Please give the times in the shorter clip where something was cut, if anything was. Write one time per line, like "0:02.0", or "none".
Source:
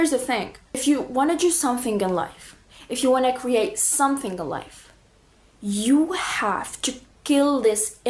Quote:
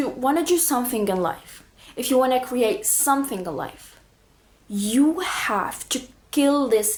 none